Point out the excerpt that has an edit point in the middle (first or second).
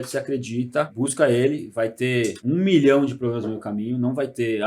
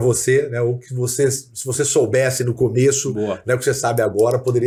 first